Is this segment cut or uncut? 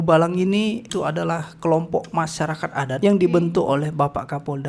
cut